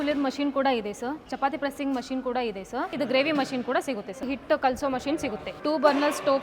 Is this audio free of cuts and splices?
no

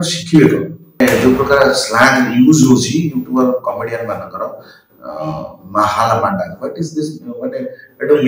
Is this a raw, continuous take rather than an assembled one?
no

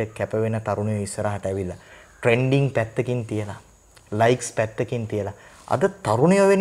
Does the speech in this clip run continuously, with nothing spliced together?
yes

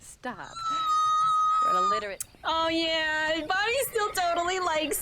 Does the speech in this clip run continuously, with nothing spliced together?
no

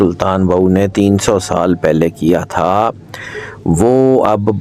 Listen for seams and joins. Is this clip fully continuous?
yes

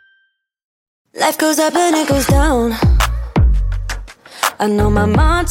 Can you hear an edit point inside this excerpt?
yes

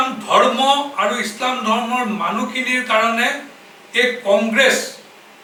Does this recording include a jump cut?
no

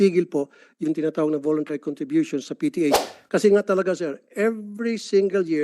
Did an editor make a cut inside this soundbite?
yes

